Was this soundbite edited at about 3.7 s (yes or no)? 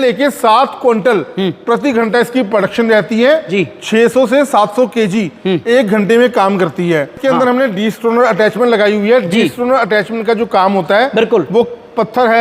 no